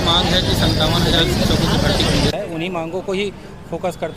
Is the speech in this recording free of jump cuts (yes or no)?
yes